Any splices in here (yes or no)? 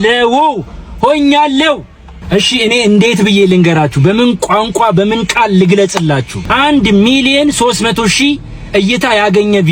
yes